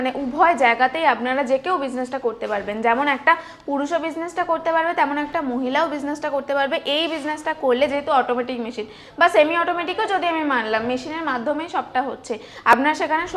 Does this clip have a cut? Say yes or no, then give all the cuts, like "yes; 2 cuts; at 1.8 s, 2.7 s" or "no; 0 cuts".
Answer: no; 0 cuts